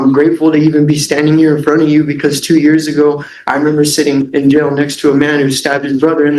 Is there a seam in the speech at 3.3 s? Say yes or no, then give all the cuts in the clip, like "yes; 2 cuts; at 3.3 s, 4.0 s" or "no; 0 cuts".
no; 0 cuts